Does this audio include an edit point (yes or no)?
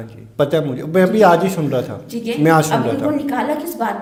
no